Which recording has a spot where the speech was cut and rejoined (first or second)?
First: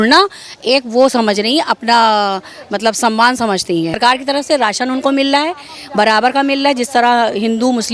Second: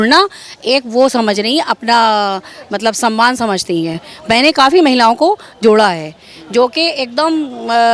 first